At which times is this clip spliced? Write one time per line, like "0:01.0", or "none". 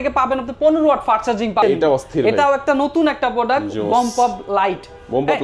0:01.6